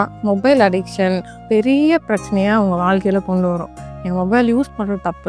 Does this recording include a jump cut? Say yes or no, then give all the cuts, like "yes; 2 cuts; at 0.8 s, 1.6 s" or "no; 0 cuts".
yes; 1 cut; at 1.4 s